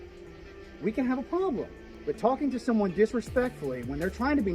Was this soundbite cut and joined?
yes; 1 cut; at 1.8 s

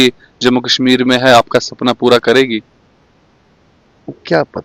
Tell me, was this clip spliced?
no; 0 cuts

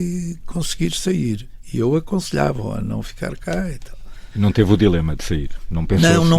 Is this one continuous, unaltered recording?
no; 1 cut; at 1.5 s

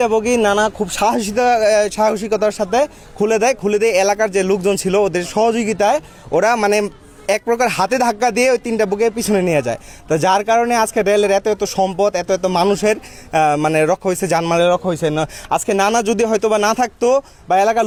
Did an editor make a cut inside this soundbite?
no; 0 cuts

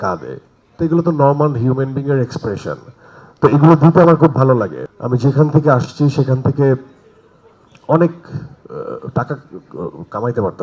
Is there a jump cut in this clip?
yes; 1 cut; at 4.8 s

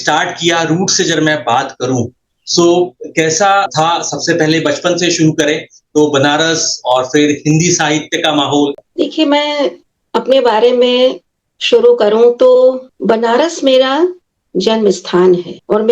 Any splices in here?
yes; 1 cut; at 8.8 s

